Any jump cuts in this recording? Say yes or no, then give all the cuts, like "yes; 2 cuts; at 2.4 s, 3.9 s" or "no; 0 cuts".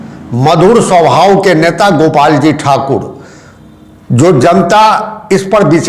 no; 0 cuts